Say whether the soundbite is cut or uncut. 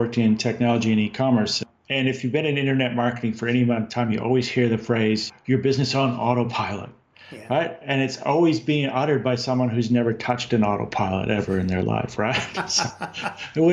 cut